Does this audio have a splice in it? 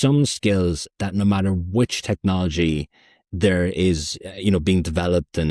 no; 0 cuts

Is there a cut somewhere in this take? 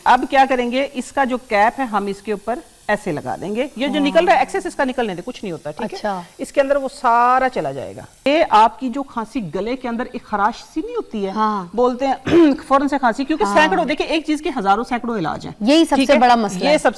yes; 1 cut; at 8.3 s

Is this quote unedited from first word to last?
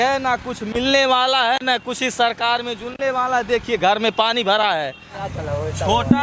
no; 1 cut; at 5.3 s

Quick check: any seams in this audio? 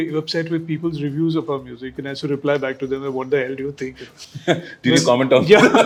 no; 0 cuts

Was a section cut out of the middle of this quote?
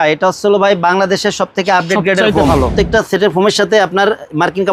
yes; 1 cut; at 2.6 s

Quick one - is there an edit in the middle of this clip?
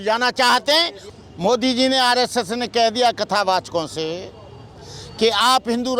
yes; 1 cut; at 1.0 s

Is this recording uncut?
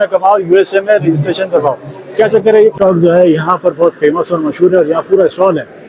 no; 1 cut; at 2.8 s

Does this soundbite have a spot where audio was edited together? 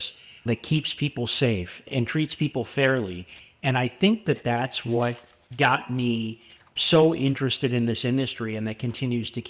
no; 0 cuts

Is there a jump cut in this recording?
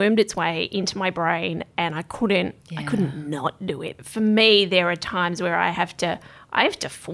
yes; 2 cuts; at 2.7 s, 4.0 s

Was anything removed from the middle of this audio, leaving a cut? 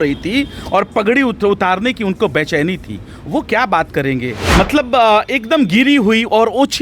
yes; 1 cut; at 4.4 s

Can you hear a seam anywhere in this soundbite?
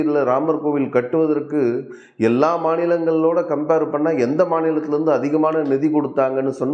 no; 0 cuts

